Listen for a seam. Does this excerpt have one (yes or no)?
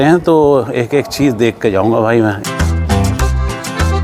yes